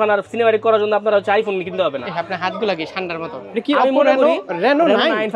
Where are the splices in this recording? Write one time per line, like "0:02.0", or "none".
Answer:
0:03.5